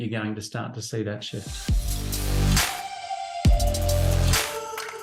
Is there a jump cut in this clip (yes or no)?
yes